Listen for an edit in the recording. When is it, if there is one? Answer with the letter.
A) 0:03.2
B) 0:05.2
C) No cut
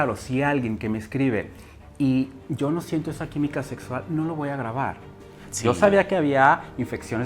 B